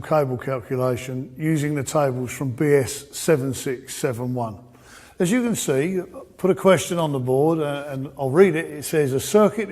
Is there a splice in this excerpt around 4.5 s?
no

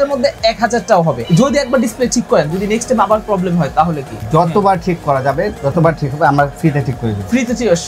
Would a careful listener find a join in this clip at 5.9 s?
no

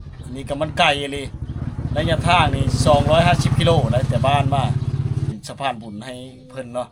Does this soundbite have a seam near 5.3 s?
yes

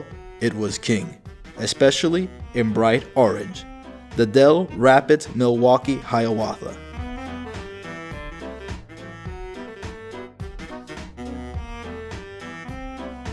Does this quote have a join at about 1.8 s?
yes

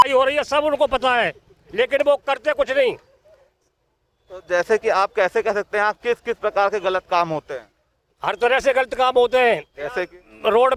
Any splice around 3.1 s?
no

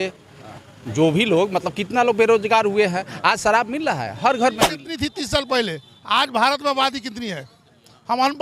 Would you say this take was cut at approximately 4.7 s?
yes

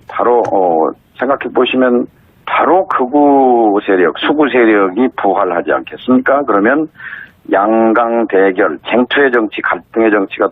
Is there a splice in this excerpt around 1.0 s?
no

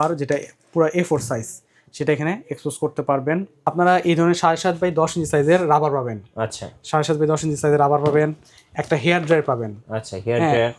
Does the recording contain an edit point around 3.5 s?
yes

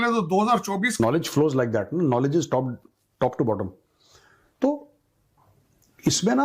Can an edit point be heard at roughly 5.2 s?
no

